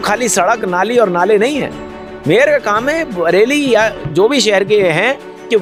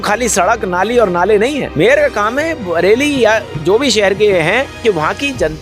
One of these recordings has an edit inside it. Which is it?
second; 2 cuts; at 1.7 s, 4.7 s

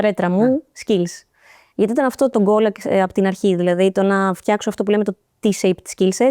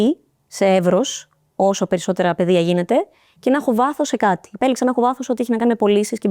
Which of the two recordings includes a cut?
first; 1 cut; at 2.3 s

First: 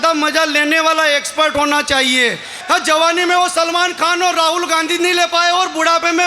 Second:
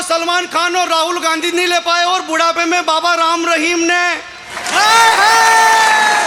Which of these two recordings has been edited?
first; 1 cut; at 2.6 s

